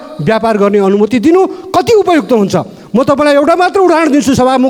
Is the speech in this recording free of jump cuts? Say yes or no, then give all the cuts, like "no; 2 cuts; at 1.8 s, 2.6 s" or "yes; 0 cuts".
yes; 0 cuts